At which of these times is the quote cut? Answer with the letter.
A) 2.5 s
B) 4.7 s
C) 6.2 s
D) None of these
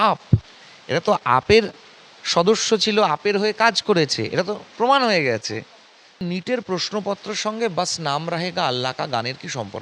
C